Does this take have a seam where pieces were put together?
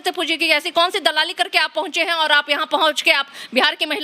no; 0 cuts

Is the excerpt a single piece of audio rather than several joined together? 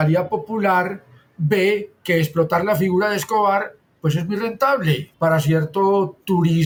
yes; 0 cuts

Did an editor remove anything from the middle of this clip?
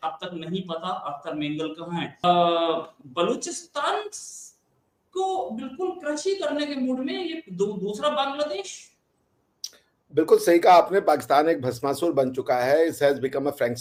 no; 0 cuts

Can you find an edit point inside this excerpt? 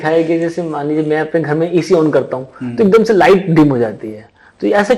no; 0 cuts

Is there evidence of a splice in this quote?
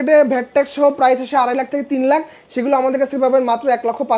no; 0 cuts

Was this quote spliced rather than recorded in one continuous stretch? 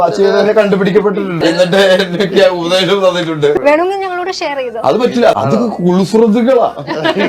yes; 3 cuts; at 1.4 s, 3.6 s, 5.3 s

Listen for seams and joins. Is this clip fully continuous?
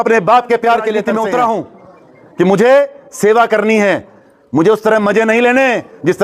no; 1 cut; at 1.1 s

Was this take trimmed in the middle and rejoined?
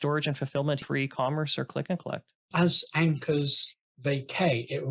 yes; 2 cuts; at 0.8 s, 2.4 s

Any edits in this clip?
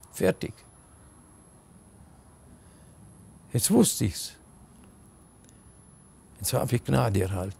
no; 0 cuts

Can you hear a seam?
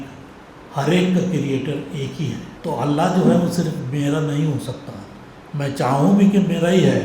yes; 1 cut; at 2.5 s

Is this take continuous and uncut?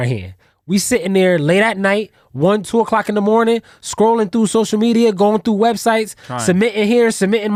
yes; 0 cuts

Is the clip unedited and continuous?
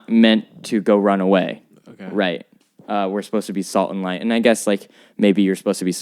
yes; 0 cuts

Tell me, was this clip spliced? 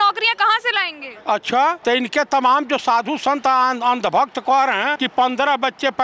yes; 2 cuts; at 1.8 s, 5.0 s

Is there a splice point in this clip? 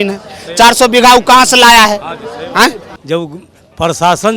yes; 1 cut; at 2.9 s

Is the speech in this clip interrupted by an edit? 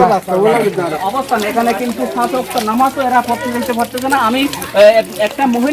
yes; 1 cut; at 0.9 s

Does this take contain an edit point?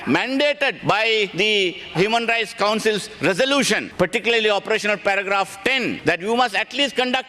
yes; 3 cuts; at 1.1 s, 3.9 s, 6.0 s

